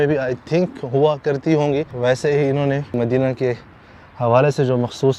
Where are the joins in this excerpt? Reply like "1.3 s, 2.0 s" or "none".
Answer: 1.9 s, 2.9 s